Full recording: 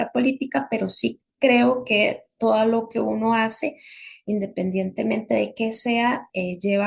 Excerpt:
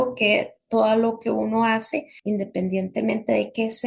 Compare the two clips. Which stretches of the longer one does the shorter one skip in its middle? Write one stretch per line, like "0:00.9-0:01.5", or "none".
0:03.8-0:04.1